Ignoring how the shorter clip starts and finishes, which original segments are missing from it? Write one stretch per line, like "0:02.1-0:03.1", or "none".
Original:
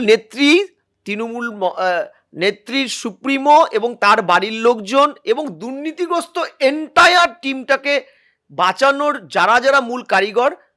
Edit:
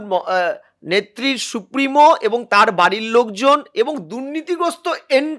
none